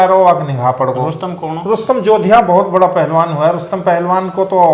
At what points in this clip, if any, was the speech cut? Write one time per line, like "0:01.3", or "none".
none